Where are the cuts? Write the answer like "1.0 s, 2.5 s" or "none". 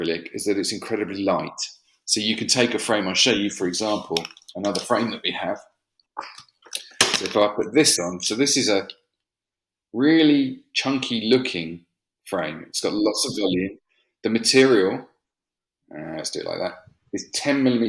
none